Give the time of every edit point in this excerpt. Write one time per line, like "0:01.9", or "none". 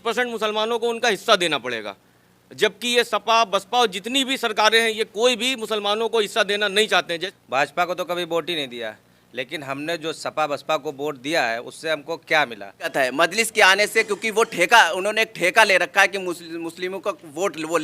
0:07.2
0:12.9